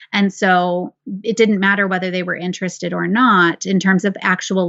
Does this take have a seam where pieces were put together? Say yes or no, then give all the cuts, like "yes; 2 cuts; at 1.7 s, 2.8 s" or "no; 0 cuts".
no; 0 cuts